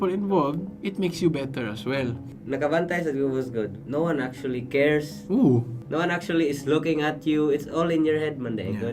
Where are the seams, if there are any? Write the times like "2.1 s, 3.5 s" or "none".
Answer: 2.3 s, 3.8 s, 5.8 s